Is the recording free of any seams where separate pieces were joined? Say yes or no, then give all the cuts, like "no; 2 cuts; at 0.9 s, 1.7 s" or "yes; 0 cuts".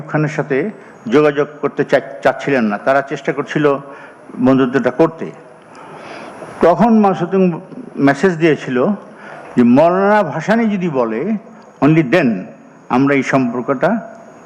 yes; 0 cuts